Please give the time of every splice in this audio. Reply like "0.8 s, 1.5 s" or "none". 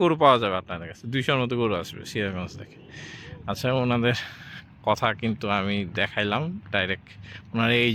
none